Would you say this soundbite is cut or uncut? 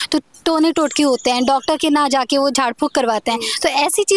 uncut